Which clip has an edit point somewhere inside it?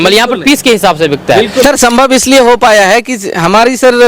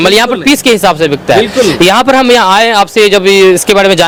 first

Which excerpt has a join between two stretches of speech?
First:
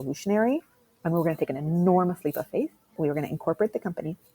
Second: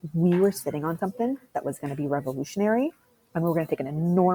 first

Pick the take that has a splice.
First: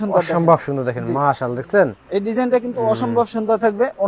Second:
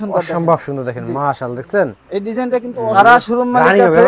second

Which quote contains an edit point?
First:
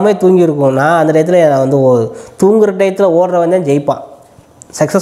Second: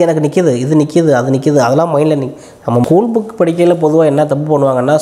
second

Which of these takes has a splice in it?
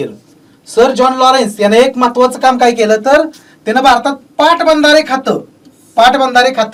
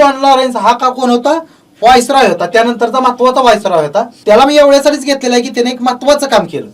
second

